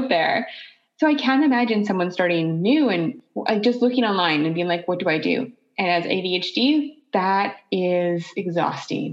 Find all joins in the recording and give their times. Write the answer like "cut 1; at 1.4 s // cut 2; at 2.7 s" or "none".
cut 1; at 3.3 s // cut 2; at 7.0 s